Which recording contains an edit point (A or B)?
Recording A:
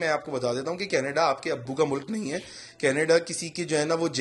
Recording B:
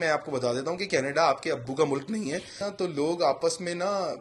B